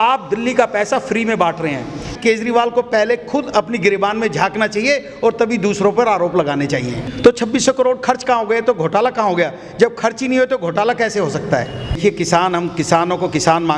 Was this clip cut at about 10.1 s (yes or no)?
no